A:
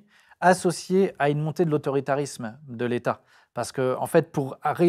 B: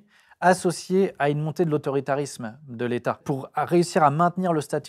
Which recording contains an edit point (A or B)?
B